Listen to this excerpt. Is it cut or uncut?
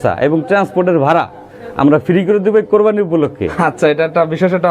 uncut